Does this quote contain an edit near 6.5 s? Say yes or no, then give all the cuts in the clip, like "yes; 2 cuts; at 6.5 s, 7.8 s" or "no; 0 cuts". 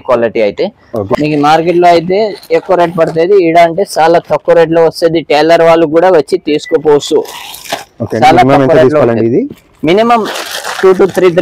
no; 1 cut; at 1.1 s